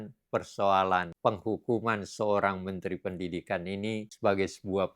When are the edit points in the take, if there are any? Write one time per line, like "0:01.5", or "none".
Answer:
0:01.1
0:04.1

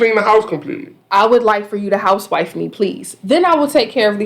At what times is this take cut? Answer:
0:00.9

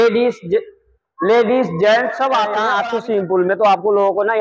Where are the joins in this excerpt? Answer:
0:02.6

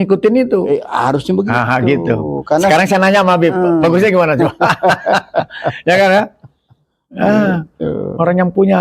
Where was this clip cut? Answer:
none

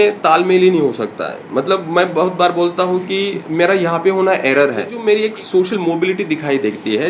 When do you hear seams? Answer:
0:05.0

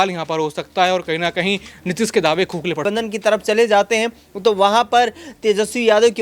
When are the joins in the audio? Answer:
0:02.8

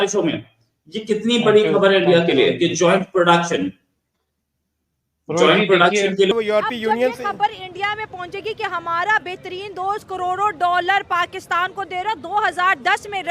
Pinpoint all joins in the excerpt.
0:06.3

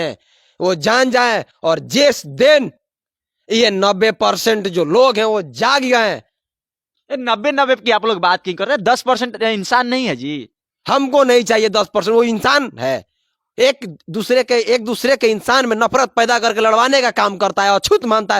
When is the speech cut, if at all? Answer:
none

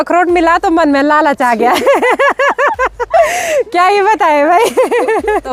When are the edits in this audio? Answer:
none

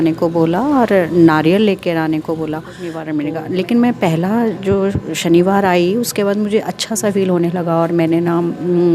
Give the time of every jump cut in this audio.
0:03.0

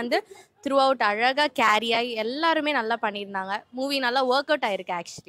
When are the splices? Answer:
none

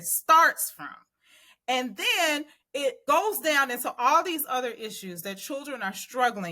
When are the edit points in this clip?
0:03.0

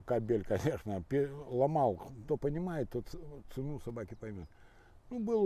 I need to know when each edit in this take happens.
0:02.1

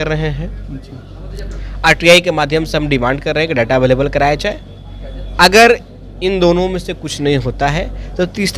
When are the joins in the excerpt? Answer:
none

